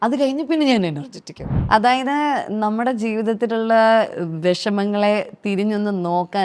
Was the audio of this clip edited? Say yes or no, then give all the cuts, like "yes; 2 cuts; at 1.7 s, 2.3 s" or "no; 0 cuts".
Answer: yes; 1 cut; at 1.5 s